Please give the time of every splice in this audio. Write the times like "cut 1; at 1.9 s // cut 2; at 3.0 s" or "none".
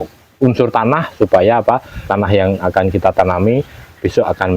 cut 1; at 2.1 s